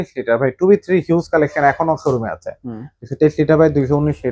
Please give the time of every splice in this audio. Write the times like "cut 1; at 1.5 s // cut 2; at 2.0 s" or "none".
none